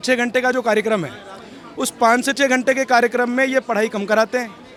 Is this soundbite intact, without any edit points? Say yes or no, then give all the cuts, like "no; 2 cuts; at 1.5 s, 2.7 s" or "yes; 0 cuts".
yes; 0 cuts